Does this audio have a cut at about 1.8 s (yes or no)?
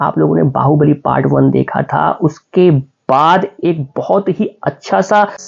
no